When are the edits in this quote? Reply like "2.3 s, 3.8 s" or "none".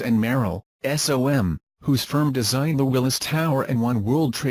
none